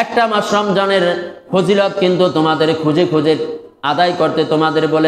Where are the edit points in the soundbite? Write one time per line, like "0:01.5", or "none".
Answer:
none